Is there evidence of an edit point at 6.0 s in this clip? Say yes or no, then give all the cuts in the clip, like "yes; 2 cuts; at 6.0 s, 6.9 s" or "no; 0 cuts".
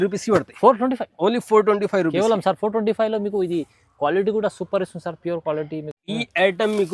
yes; 1 cut; at 6.0 s